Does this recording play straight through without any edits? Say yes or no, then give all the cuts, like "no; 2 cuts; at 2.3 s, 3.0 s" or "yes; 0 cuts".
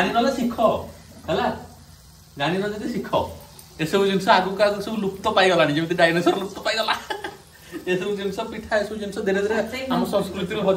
yes; 0 cuts